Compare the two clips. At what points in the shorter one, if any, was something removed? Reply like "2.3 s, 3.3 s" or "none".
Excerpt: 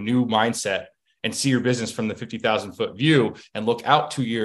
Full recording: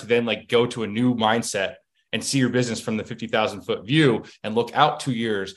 none